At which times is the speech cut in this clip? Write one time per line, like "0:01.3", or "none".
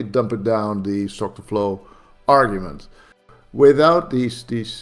0:03.3